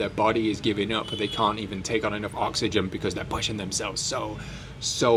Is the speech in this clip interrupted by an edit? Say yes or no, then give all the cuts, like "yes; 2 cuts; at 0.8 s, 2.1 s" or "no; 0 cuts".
no; 0 cuts